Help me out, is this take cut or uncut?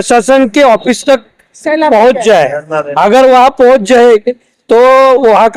uncut